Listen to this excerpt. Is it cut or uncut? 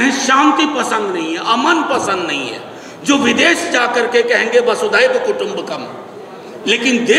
uncut